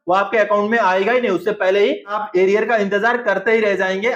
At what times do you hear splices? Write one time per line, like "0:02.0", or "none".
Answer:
0:02.2

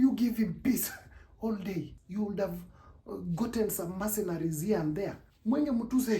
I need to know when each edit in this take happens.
0:02.0
0:05.3

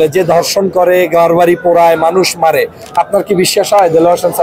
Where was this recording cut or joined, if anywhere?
none

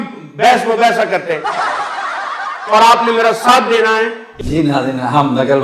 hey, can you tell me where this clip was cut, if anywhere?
0:01.5
0:02.6

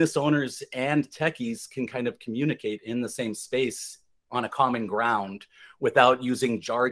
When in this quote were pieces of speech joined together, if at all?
none

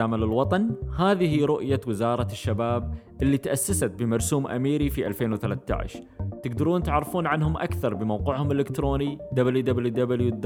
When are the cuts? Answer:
none

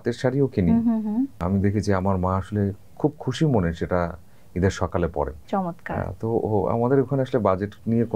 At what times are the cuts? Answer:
0:01.4
0:05.4

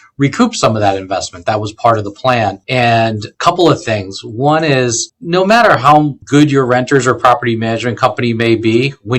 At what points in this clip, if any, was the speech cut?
0:03.2
0:05.1
0:06.2

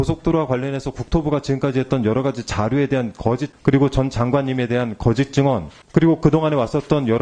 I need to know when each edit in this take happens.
0:03.5
0:05.8

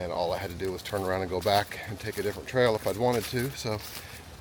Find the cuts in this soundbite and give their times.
none

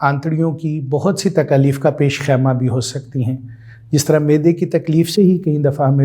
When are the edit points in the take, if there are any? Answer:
none

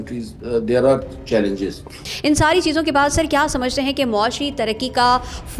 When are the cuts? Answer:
0:02.0

